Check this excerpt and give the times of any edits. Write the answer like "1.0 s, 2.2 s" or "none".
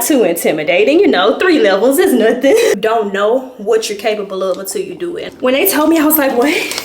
2.8 s, 5.3 s